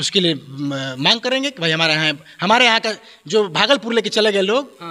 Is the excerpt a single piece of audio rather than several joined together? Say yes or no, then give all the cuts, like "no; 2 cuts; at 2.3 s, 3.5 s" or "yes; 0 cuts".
yes; 0 cuts